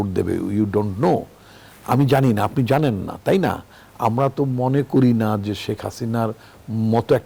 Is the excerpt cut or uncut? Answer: uncut